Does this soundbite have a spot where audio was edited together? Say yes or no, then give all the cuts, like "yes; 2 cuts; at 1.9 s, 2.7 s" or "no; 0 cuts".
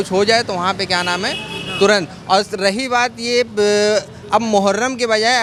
no; 0 cuts